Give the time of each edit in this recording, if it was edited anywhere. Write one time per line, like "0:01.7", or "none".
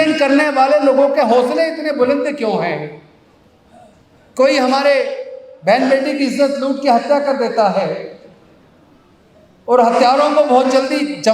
none